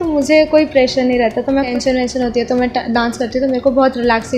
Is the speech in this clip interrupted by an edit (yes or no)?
yes